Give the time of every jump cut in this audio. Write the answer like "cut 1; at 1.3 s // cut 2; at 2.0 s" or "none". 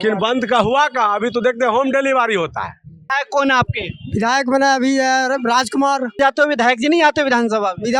cut 1; at 3.2 s // cut 2; at 6.2 s